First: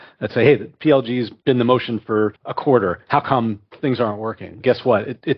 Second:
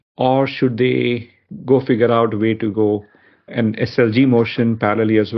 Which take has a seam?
first; 2 cuts; at 1.3 s, 2.5 s

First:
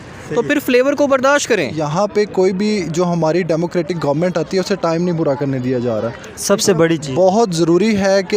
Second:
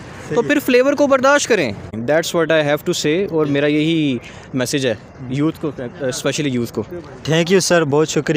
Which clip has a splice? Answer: first; 1 cut; at 1.8 s

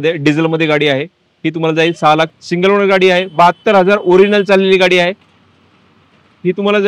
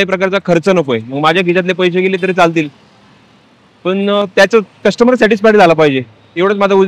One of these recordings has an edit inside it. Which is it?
first; 1 cut; at 2.3 s

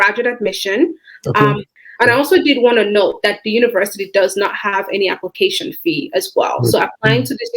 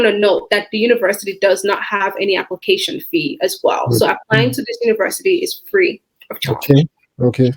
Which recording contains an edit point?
first; 1 cut; at 1.7 s

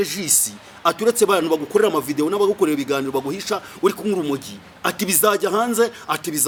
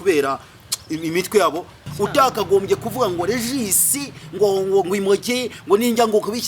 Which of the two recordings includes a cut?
second; 1 cut; at 1.8 s

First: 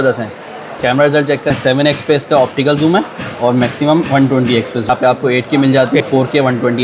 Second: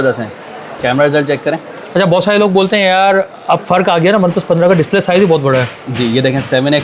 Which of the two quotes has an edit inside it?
first; 3 cuts; at 1.5 s, 4.9 s, 6.1 s

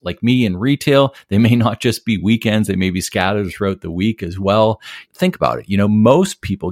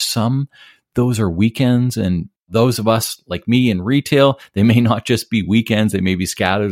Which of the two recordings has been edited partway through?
second; 1 cut; at 2.3 s

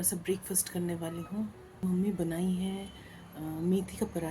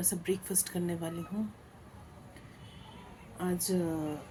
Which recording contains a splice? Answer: first; 1 cut; at 1.8 s

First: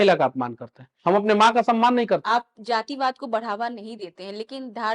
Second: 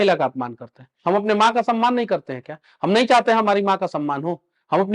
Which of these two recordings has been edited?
first; 1 cut; at 2.2 s

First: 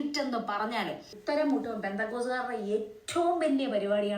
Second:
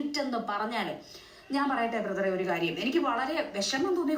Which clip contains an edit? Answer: first; 1 cut; at 1.1 s

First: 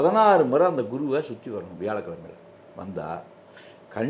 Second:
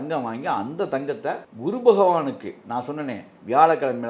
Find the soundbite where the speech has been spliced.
second; 1 cut; at 1.5 s

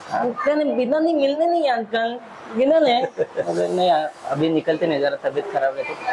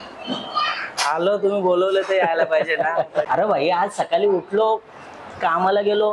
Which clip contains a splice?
second; 1 cut; at 3.3 s

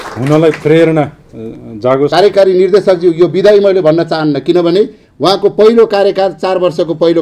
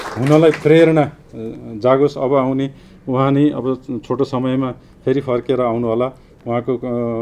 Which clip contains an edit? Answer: first; 1 cut; at 2.1 s

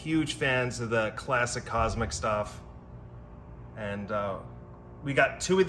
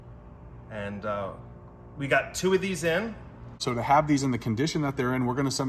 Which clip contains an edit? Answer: second; 1 cut; at 3.6 s

